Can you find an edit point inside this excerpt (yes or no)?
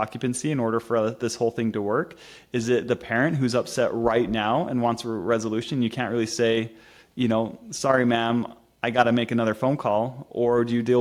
no